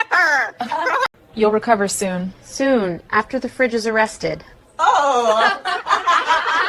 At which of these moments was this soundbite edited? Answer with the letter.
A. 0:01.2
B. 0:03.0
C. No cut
A